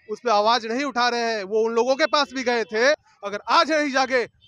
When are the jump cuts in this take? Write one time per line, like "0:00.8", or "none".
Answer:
0:03.0